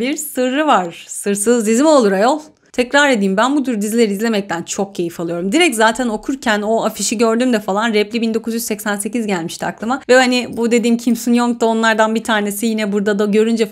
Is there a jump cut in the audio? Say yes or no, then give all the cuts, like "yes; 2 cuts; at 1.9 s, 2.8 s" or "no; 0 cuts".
no; 0 cuts